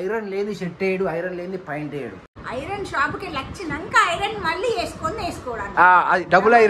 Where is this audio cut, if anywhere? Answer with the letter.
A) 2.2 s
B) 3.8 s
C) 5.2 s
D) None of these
A